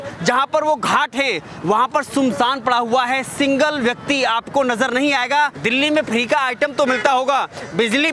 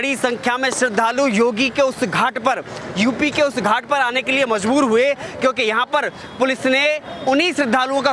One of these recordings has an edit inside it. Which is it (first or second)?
first